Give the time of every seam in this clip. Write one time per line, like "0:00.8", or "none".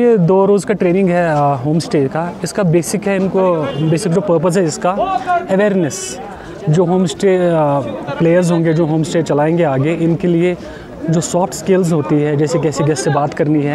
none